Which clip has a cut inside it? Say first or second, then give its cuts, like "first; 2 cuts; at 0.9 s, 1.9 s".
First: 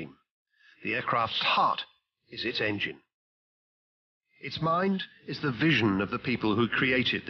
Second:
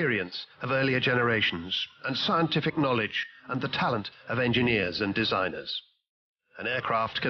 second; 1 cut; at 2.8 s